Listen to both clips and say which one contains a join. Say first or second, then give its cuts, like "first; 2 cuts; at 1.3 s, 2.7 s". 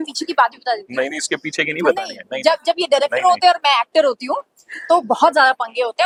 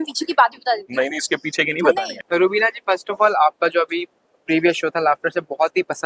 second; 1 cut; at 2.1 s